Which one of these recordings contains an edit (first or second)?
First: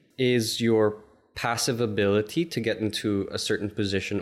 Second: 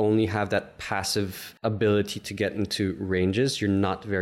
second